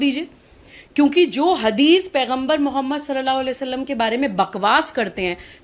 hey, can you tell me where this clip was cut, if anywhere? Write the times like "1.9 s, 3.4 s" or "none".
none